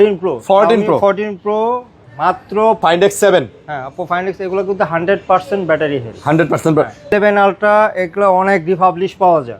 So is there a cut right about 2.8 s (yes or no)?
yes